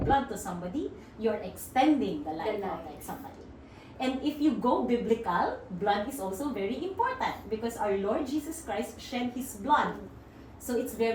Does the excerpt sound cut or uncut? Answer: uncut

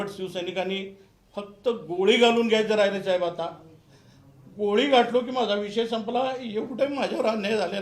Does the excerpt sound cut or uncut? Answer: uncut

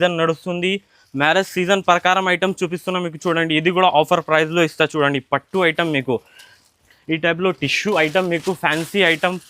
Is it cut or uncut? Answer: uncut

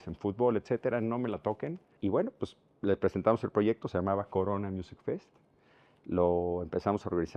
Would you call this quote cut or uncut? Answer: cut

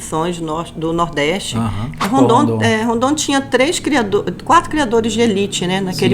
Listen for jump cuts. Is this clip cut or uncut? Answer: cut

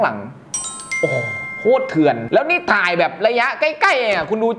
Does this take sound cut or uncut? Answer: cut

